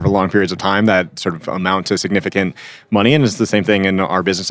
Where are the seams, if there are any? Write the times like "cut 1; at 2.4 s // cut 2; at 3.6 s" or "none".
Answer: cut 1; at 1.6 s